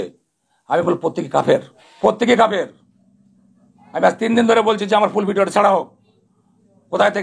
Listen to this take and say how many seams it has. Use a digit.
1